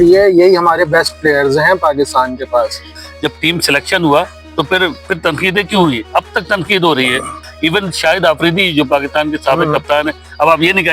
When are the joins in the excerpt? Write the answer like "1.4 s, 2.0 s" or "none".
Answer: 3.0 s, 7.4 s